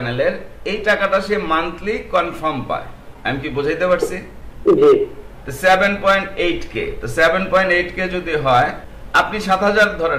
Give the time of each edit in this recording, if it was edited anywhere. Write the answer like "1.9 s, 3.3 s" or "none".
none